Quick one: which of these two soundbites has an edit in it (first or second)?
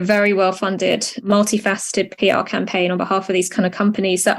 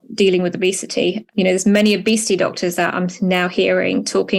first